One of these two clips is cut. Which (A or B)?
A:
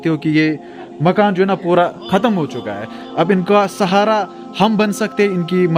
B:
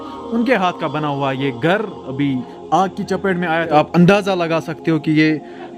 B